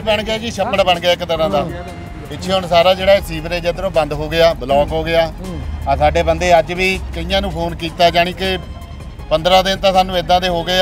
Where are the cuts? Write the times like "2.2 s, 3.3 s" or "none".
none

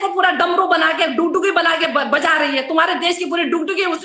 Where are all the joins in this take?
none

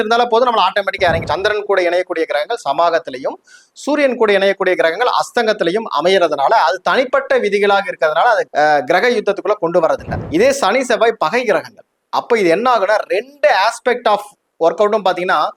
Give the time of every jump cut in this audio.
1.2 s, 10.1 s

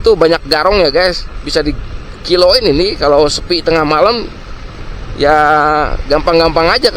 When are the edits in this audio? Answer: none

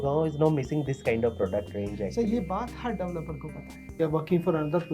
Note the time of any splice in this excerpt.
4.0 s

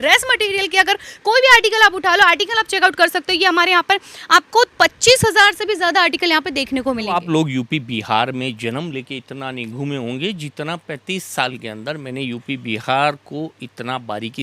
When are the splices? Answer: 7.2 s

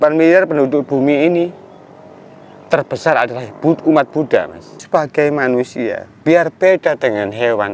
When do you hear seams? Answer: 4.8 s

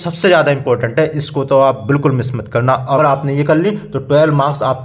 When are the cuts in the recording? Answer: 2.8 s

